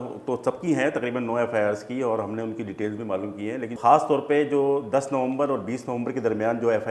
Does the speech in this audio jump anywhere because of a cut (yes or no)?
yes